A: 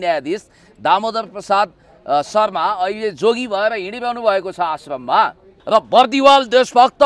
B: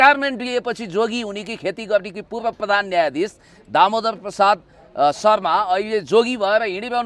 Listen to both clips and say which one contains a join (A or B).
A